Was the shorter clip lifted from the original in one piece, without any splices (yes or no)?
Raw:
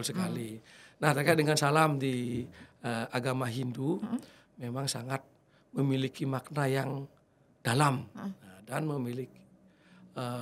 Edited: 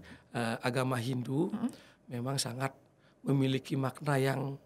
yes